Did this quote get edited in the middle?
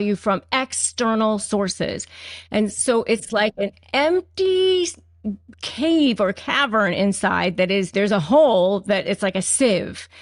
yes; 1 cut; at 7.9 s

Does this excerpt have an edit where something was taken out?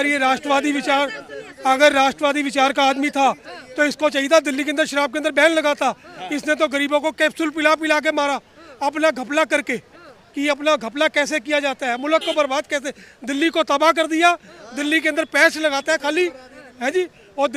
no; 0 cuts

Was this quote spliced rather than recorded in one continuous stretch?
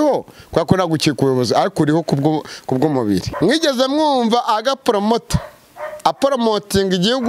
yes; 1 cut; at 3.3 s

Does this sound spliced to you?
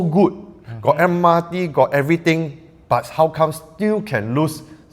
no; 0 cuts

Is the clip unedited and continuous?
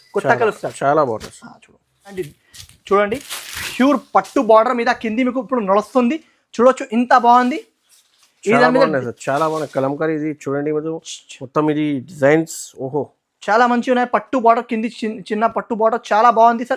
no; 1 cut; at 2.2 s

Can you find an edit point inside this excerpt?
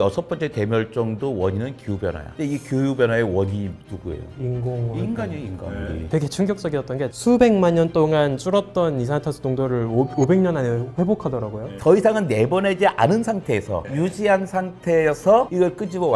yes; 3 cuts; at 6.1 s, 7.1 s, 11.7 s

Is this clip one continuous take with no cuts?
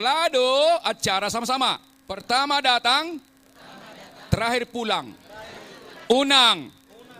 no; 1 cut; at 2.2 s

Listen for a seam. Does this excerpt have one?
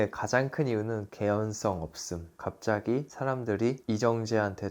yes; 1 cut; at 1.0 s

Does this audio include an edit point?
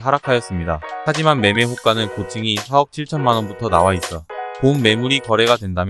yes; 1 cut; at 0.9 s

